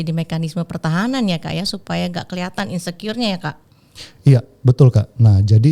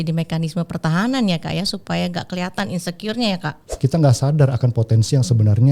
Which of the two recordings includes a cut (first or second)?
second